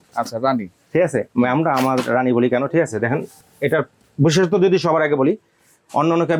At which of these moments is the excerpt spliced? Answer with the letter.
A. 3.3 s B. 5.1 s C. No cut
C